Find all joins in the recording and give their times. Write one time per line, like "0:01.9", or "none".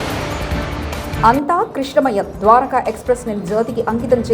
0:01.1